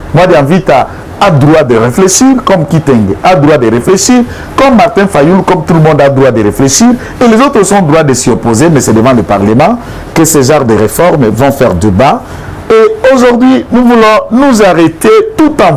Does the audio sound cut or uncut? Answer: uncut